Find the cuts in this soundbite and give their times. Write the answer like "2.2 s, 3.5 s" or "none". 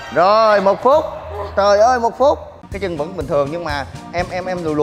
2.6 s